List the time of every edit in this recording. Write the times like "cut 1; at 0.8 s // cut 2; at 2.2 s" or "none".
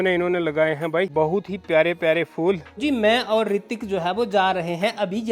cut 1; at 1.1 s // cut 2; at 2.7 s